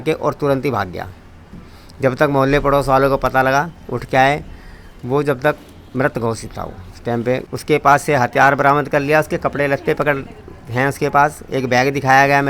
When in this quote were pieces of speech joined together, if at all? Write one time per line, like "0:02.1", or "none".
0:07.5